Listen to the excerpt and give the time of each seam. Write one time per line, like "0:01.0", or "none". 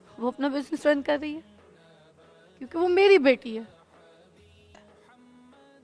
0:04.6